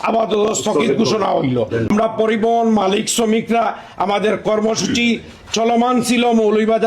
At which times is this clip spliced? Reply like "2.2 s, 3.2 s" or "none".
1.9 s